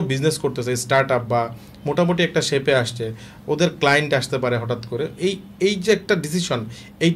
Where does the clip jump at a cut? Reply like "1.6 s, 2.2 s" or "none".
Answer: none